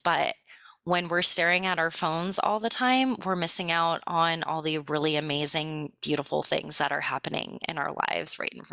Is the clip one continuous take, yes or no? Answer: yes